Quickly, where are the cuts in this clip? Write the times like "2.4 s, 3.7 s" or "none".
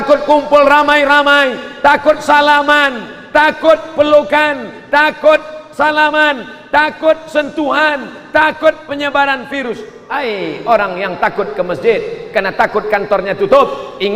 9.9 s